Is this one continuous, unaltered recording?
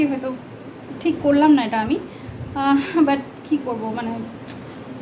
yes; 0 cuts

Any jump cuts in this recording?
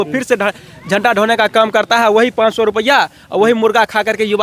no; 0 cuts

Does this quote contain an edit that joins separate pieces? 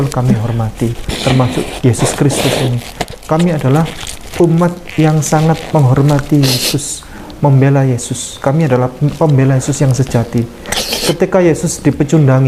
no; 0 cuts

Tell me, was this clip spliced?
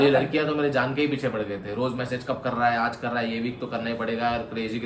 no; 0 cuts

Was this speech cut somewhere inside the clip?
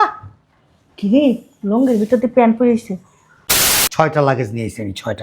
yes; 1 cut; at 3.7 s

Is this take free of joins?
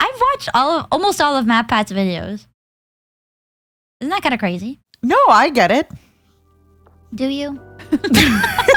yes; 0 cuts

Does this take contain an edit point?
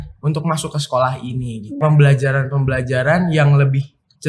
yes; 1 cut; at 1.8 s

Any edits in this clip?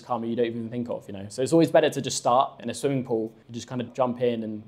yes; 2 cuts; at 2.6 s, 3.9 s

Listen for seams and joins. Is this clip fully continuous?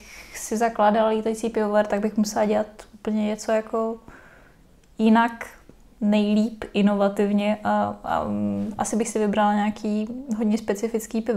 yes; 0 cuts

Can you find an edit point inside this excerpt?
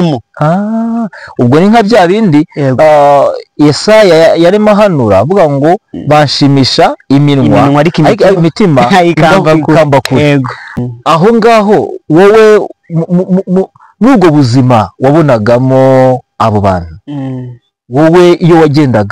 no; 0 cuts

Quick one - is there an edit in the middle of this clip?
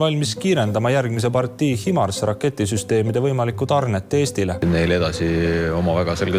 yes; 1 cut; at 4.6 s

